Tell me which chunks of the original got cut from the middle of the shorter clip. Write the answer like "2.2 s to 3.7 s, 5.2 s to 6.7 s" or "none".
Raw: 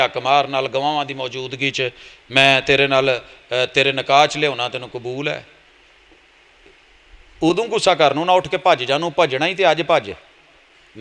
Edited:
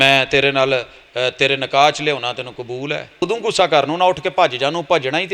5.6 s to 7.5 s